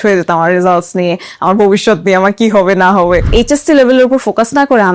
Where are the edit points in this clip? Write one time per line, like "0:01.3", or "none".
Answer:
0:03.3